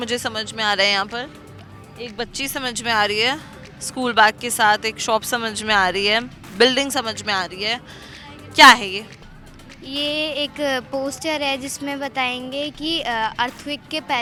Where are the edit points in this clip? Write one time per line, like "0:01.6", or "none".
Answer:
none